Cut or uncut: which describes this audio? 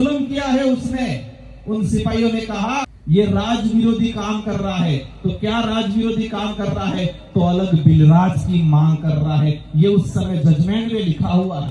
cut